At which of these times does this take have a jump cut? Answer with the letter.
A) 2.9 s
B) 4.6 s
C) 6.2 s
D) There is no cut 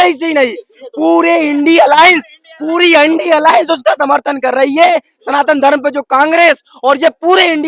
D